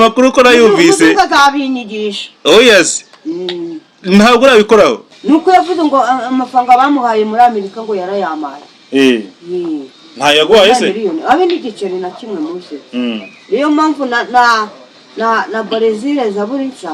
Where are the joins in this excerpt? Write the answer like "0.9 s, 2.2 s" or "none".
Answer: 5.1 s